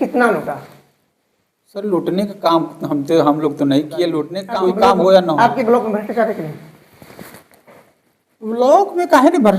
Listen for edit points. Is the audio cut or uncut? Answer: cut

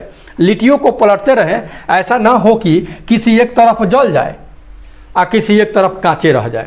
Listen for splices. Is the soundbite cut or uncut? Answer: uncut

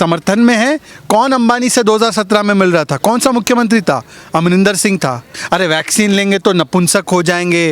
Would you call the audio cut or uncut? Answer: cut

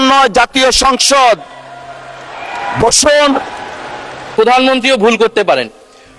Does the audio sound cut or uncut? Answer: cut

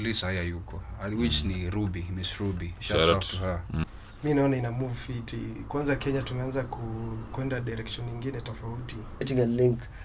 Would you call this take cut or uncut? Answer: cut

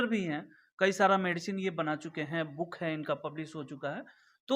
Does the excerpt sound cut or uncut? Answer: uncut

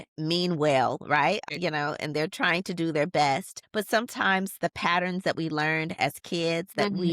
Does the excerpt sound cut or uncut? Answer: cut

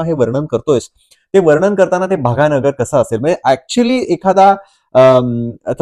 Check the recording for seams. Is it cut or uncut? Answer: uncut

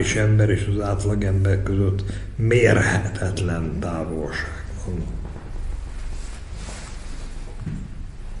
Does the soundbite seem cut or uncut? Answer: uncut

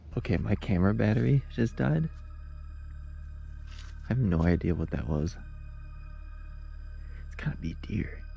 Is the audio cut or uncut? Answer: uncut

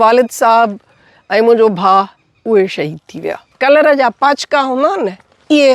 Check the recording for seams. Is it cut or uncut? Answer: cut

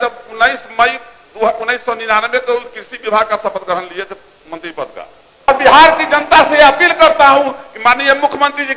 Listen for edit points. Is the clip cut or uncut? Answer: cut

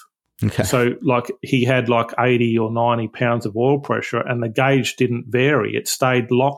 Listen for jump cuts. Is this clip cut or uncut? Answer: uncut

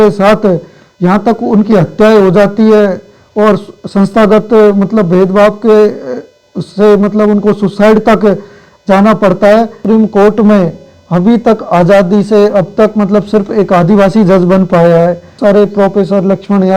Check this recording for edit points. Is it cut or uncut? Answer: cut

